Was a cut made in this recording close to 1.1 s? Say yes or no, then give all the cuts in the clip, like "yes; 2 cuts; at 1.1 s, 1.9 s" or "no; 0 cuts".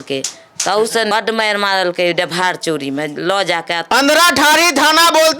yes; 2 cuts; at 1.1 s, 3.9 s